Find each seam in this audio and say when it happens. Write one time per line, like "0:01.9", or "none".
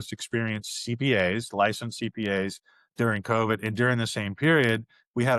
none